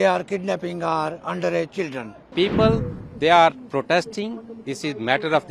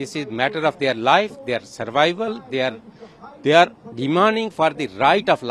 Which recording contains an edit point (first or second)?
first